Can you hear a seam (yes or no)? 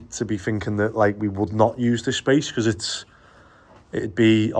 no